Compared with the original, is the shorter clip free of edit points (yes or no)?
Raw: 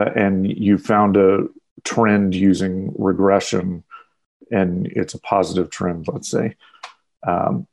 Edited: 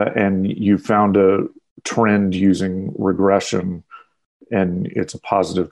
yes